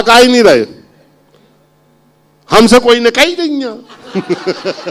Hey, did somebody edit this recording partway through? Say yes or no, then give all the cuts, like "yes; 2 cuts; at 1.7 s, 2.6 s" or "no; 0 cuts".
no; 0 cuts